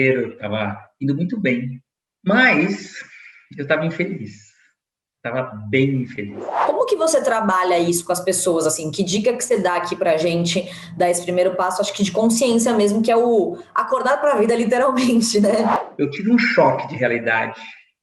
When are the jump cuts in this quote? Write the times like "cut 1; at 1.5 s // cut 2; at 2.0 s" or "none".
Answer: cut 1; at 6.5 s // cut 2; at 15.7 s

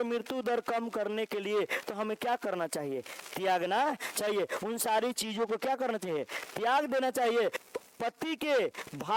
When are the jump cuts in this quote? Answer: cut 1; at 7.6 s

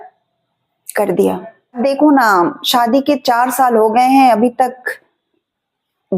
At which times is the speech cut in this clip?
cut 1; at 1.8 s

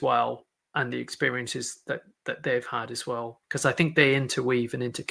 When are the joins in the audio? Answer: cut 1; at 3.4 s

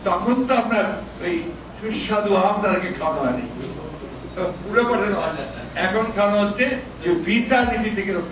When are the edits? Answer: none

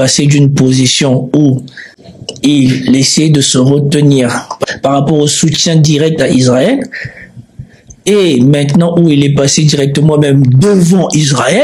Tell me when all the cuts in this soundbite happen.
cut 1; at 4.5 s

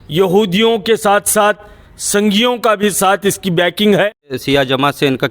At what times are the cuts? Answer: cut 1; at 4.4 s

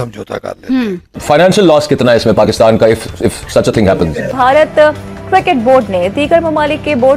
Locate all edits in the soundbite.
cut 1; at 1.2 s // cut 2; at 4.3 s

